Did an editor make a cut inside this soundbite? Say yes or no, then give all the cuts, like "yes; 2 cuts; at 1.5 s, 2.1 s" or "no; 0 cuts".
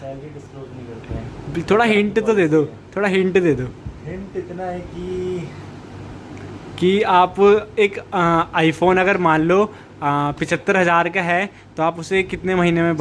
no; 0 cuts